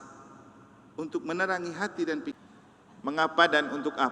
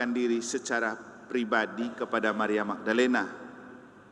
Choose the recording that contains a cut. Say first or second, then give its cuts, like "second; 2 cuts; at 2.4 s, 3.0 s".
first; 1 cut; at 2.4 s